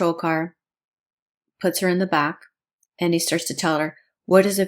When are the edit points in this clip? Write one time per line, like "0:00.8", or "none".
none

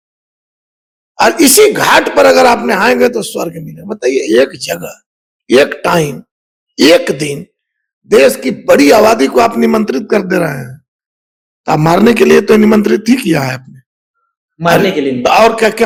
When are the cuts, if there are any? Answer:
none

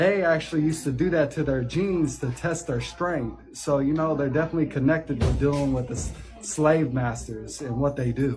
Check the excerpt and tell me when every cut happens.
none

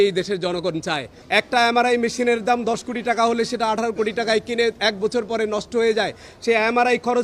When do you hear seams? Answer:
0:01.1

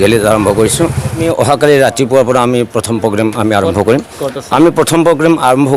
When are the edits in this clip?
0:01.3

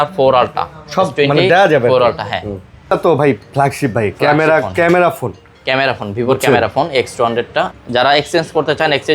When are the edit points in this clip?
0:02.9
0:07.7

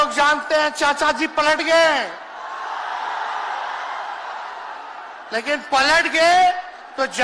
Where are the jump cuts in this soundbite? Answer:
none

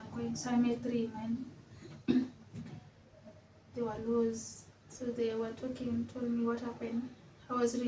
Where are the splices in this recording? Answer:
none

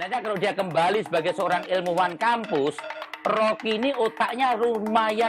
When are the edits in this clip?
none

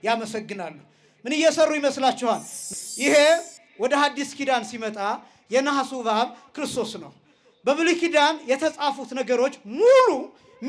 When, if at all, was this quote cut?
0:02.6

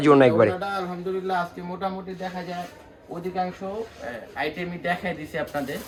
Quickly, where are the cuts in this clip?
none

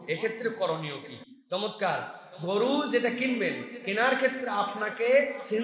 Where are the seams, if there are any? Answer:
none

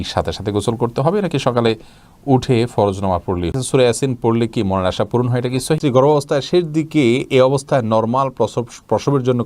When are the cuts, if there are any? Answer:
0:03.6
0:05.8

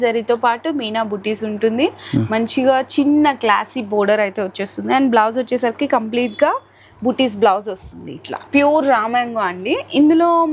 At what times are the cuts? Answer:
none

